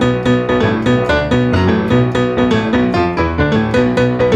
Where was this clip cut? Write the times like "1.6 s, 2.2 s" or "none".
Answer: none